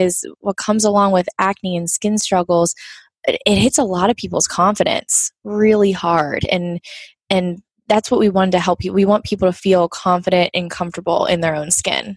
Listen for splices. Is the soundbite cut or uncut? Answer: uncut